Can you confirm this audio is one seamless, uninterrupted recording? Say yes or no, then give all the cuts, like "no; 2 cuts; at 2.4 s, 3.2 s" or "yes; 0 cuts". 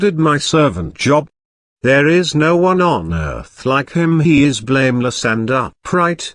yes; 0 cuts